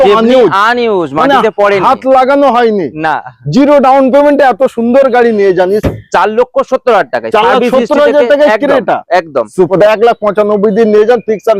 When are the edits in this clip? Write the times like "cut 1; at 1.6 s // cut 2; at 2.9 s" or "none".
cut 1; at 5.8 s // cut 2; at 9.7 s